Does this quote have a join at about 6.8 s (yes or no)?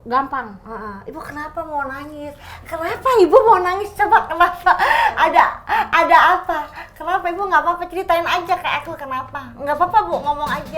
no